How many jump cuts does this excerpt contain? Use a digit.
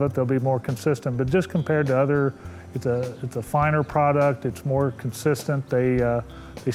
0